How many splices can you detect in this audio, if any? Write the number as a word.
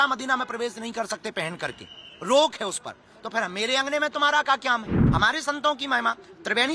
one